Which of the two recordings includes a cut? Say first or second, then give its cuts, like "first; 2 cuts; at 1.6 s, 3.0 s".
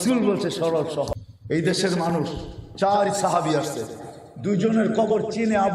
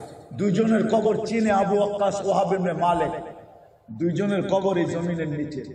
first; 1 cut; at 1.3 s